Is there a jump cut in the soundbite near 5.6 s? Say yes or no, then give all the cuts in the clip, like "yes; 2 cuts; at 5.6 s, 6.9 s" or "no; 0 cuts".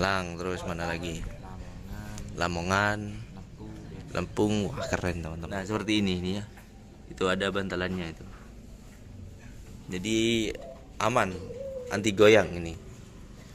yes; 1 cut; at 5.6 s